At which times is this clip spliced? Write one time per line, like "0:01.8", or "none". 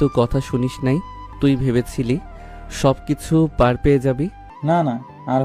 0:01.2
0:04.5